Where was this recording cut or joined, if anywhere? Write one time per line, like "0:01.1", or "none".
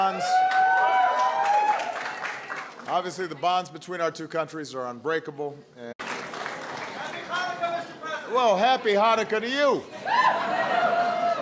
none